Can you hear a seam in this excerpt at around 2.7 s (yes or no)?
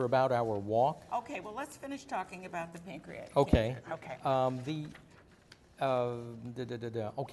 yes